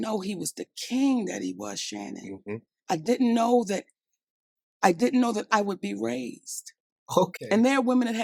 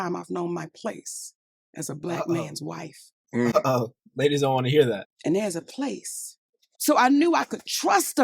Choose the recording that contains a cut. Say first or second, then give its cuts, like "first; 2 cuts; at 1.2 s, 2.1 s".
second; 1 cut; at 6.7 s